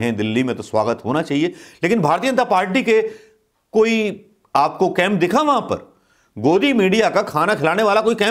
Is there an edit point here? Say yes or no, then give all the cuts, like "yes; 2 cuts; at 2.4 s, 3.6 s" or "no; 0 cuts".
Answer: no; 0 cuts